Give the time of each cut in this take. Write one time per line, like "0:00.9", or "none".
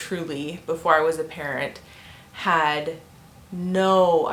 none